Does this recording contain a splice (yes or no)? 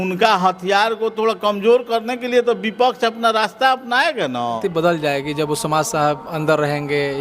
yes